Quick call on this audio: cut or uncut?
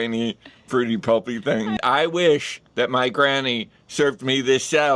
cut